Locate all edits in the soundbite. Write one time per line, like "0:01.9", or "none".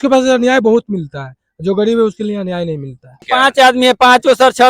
0:03.2